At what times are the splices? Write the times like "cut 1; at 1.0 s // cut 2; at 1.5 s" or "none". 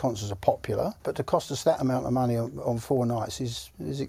cut 1; at 1.0 s